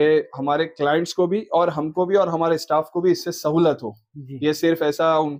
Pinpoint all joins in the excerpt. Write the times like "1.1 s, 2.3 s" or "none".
none